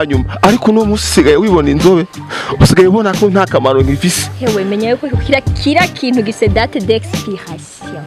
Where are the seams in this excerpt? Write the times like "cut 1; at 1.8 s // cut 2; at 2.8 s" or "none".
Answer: none